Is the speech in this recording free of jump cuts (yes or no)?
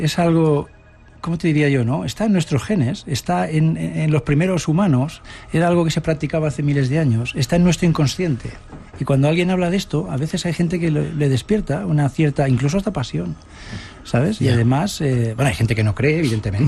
no